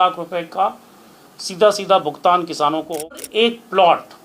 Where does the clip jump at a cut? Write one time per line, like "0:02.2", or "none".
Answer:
0:03.1